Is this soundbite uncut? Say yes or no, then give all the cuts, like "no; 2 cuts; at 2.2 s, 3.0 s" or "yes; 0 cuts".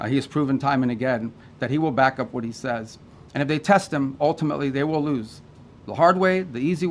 yes; 0 cuts